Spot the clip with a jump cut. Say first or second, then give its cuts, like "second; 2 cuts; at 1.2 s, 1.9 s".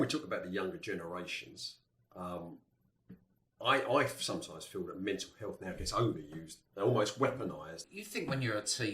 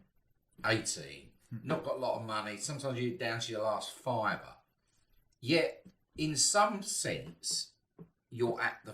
first; 1 cut; at 7.8 s